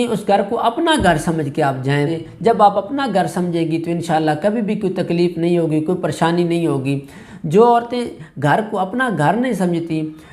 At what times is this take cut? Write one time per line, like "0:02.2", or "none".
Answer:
0:02.2